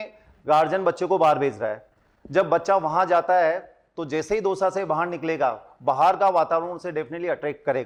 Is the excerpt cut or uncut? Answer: uncut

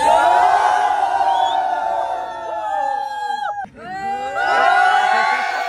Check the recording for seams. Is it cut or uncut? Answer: cut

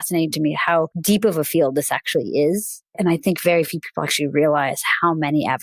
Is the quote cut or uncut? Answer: cut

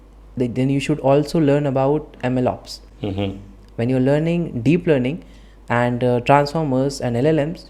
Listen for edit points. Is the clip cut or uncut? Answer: uncut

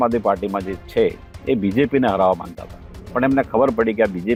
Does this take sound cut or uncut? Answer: uncut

